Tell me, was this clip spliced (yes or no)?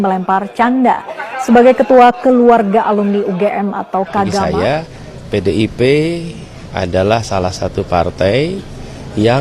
yes